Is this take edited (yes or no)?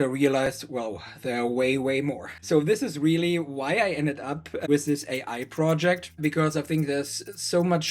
yes